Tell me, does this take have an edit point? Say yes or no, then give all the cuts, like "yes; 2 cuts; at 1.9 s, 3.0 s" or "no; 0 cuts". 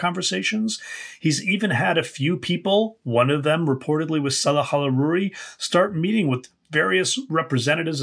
no; 0 cuts